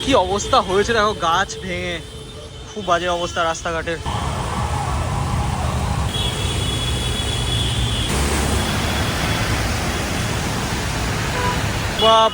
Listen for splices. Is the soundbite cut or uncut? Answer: uncut